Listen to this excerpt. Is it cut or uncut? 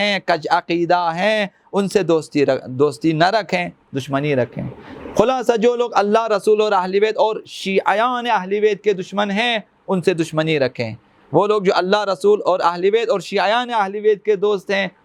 uncut